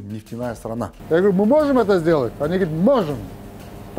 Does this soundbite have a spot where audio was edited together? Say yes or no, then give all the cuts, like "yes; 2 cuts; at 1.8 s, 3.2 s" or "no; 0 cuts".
yes; 1 cut; at 0.9 s